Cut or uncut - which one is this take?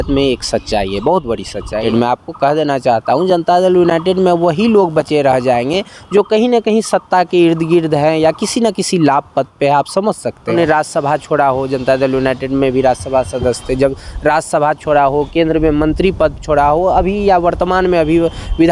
cut